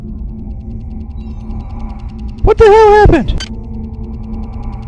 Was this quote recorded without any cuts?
no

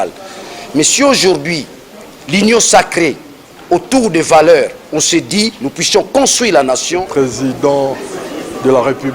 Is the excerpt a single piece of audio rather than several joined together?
no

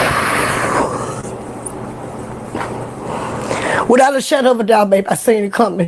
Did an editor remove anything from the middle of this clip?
no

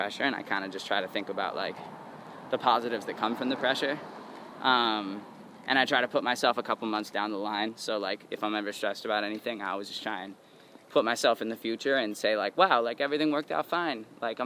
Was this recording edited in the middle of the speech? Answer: no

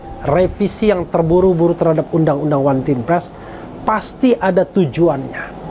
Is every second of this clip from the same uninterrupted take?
yes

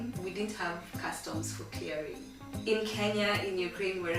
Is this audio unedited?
no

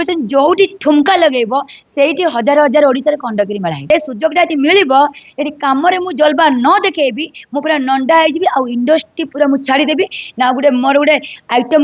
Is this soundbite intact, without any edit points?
no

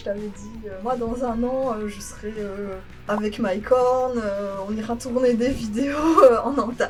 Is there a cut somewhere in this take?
no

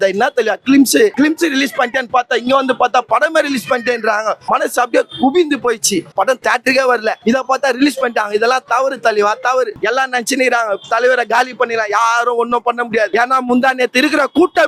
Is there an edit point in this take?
yes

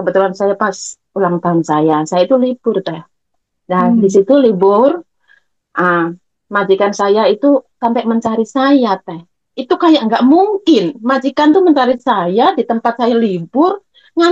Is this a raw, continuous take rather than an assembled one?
yes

